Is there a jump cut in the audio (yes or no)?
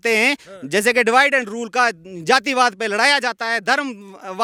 no